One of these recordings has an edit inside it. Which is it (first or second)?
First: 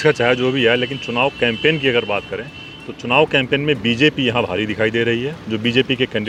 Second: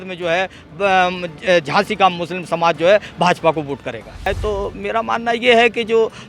second